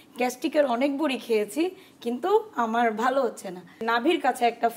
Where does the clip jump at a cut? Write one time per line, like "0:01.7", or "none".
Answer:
0:03.8